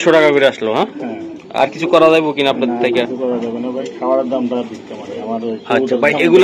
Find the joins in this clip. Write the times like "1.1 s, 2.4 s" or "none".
none